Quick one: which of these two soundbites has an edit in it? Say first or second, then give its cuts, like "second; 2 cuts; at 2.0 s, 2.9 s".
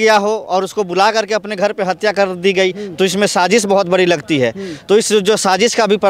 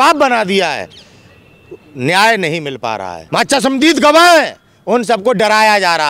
second; 1 cut; at 3.1 s